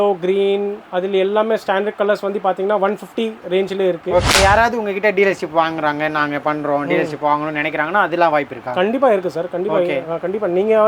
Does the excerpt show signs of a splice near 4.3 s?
yes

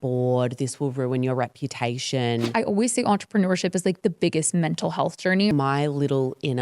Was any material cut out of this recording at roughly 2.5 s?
yes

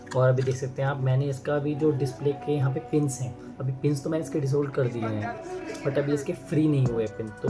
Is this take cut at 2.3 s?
no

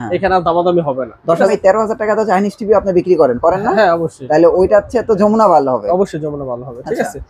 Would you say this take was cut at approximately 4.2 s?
no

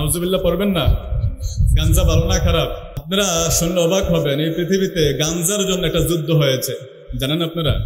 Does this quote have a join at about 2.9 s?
yes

